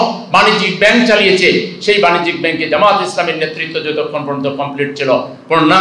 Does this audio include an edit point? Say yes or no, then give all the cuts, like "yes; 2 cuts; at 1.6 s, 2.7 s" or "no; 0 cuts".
no; 0 cuts